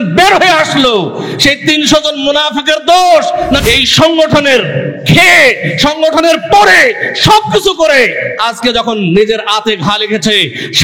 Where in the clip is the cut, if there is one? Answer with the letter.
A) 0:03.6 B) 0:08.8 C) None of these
A